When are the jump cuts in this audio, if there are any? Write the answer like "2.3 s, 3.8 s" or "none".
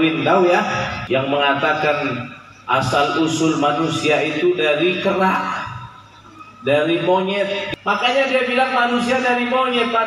1.0 s, 7.6 s